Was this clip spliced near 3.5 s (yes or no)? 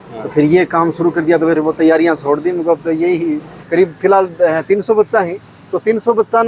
yes